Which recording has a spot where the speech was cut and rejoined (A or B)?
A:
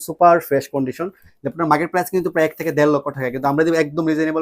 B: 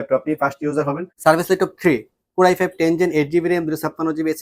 B